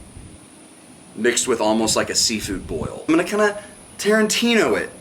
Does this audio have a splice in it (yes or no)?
yes